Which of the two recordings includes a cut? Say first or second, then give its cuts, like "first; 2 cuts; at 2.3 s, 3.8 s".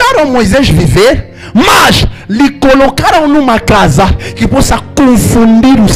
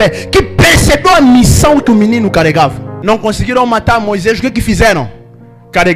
second; 1 cut; at 2.9 s